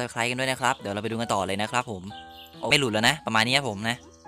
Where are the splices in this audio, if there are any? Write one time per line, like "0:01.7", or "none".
0:02.7